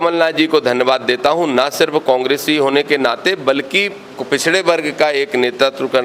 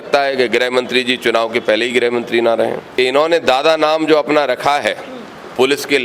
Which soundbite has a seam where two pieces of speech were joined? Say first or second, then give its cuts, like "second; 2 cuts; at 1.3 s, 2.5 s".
second; 1 cut; at 2.9 s